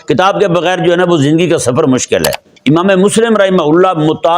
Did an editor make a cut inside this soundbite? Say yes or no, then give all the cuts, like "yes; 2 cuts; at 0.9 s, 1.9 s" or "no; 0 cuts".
yes; 1 cut; at 2.5 s